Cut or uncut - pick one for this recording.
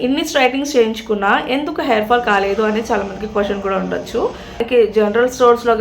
cut